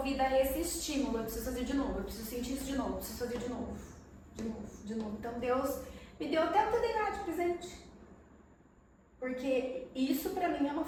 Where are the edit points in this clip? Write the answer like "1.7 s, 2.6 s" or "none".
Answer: none